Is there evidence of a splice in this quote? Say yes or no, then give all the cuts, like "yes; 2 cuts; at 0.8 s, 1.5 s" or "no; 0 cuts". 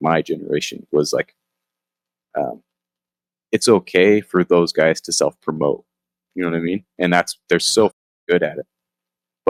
no; 0 cuts